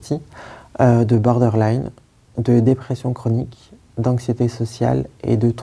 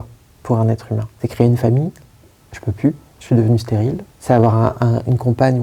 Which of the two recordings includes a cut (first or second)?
second